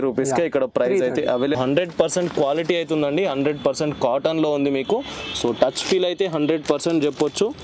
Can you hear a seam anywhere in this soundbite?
yes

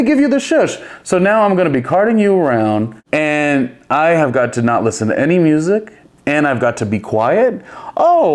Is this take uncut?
no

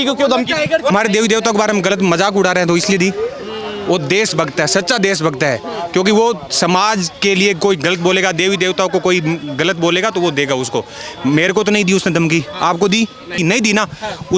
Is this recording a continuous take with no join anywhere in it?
no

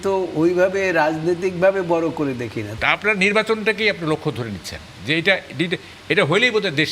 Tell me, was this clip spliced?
yes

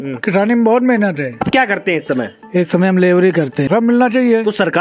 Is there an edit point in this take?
yes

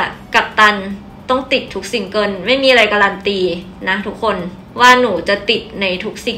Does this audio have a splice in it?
no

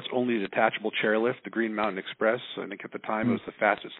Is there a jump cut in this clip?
no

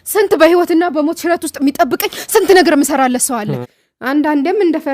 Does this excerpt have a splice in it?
yes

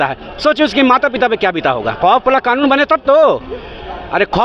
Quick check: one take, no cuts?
no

